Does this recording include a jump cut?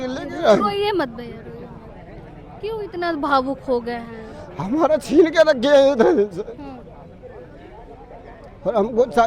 no; 0 cuts

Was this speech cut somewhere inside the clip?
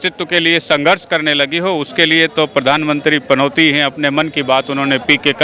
no; 0 cuts

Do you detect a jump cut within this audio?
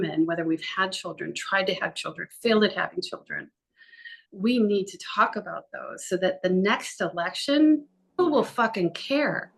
yes; 1 cut; at 8.2 s

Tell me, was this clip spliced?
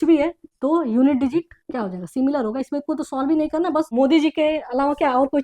yes; 1 cut; at 3.9 s

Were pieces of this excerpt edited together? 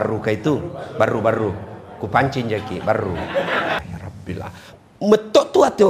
yes; 1 cut; at 3.8 s

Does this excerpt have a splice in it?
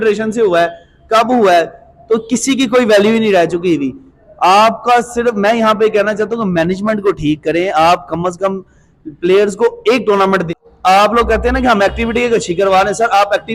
yes; 1 cut; at 10.5 s

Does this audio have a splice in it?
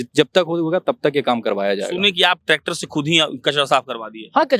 no; 0 cuts

